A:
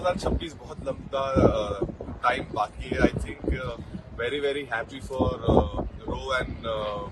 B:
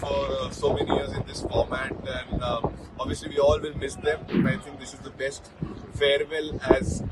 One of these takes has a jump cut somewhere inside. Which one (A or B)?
B